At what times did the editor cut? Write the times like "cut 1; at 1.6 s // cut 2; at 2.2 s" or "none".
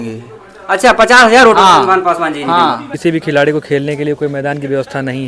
cut 1; at 2.9 s